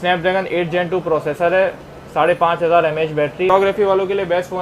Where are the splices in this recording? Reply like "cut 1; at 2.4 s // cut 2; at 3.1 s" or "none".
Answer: cut 1; at 3.5 s